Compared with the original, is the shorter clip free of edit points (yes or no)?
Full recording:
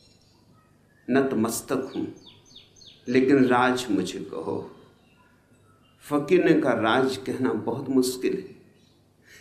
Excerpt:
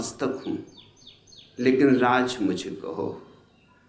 yes